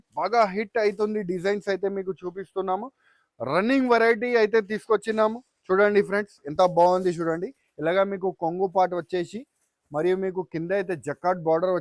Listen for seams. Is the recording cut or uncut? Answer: uncut